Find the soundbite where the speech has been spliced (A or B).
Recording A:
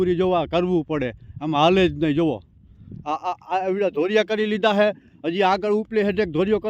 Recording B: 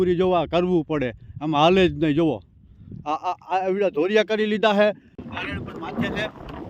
B